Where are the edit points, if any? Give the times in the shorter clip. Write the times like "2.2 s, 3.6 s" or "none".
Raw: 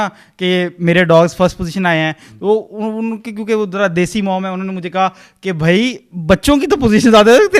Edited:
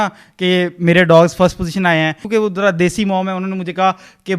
2.2 s